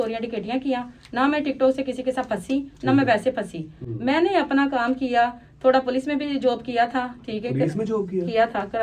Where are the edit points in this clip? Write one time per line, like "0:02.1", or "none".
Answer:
none